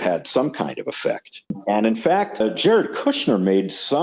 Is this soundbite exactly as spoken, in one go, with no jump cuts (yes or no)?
no